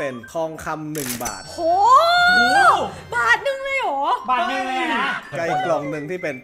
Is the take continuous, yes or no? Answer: yes